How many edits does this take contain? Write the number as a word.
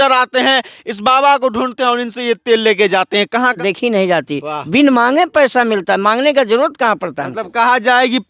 one